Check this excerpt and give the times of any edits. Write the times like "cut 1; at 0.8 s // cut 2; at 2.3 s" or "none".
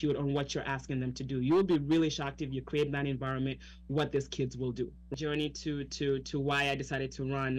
cut 1; at 5.2 s